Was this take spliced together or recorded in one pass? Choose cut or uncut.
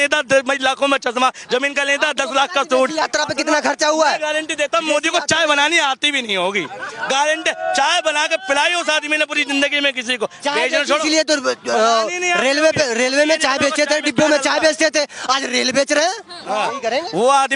uncut